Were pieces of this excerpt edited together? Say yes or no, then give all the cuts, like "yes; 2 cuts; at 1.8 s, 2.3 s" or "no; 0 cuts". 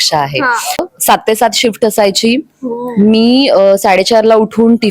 yes; 1 cut; at 0.9 s